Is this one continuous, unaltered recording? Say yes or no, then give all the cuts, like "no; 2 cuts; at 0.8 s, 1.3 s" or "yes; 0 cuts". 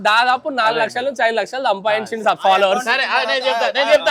yes; 0 cuts